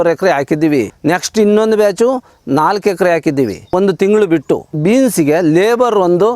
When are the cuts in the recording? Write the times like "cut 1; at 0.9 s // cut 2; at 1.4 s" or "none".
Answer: cut 1; at 0.9 s // cut 2; at 3.7 s // cut 3; at 4.8 s